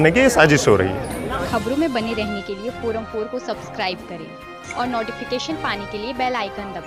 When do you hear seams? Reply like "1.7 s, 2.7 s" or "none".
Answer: none